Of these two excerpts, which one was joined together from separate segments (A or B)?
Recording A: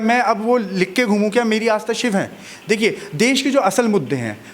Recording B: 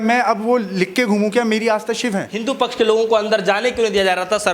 B